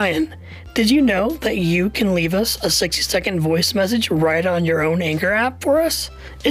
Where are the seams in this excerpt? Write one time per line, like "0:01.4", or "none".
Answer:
none